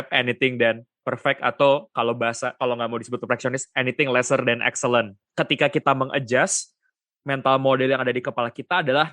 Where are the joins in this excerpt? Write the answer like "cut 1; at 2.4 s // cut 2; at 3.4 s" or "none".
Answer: cut 1; at 5.3 s